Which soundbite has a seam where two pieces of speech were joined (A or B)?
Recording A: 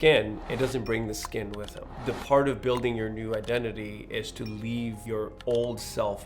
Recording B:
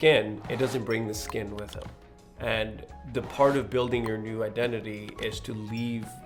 A